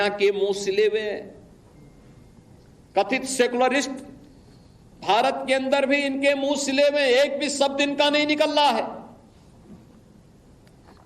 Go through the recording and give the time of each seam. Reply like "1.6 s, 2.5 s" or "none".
7.5 s